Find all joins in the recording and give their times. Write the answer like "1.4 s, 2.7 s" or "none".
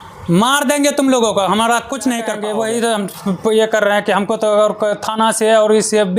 2.4 s